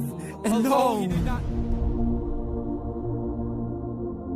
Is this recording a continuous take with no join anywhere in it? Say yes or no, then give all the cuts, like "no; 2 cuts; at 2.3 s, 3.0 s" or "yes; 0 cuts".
no; 1 cut; at 1.0 s